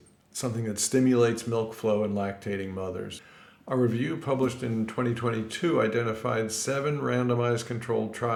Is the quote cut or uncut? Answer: uncut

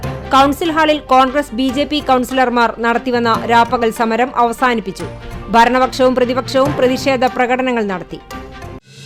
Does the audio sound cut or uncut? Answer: uncut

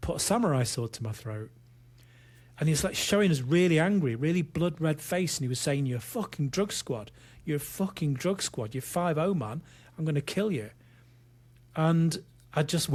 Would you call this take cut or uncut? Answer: uncut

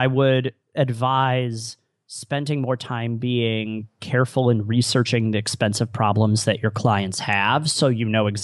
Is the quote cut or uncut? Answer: uncut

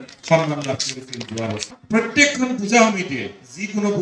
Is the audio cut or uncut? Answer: cut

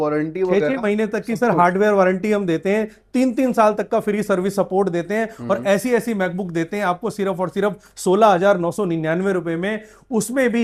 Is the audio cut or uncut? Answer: uncut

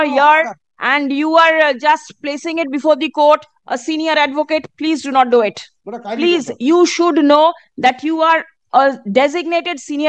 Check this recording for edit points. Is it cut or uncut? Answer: uncut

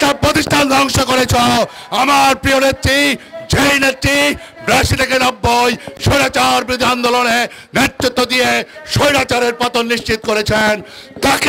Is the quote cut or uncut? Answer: uncut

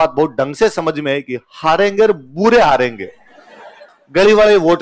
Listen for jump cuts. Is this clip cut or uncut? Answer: uncut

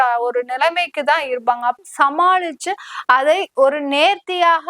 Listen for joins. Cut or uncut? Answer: cut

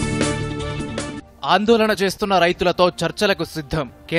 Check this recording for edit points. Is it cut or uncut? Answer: cut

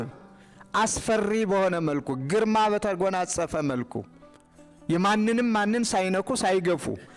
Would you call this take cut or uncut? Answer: uncut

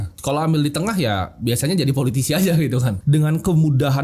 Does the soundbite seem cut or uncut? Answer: cut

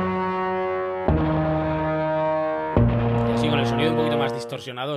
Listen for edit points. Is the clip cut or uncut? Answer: uncut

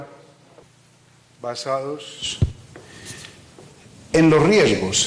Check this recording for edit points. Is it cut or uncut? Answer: uncut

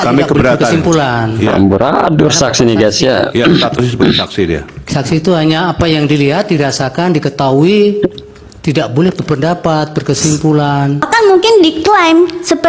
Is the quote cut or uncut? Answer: cut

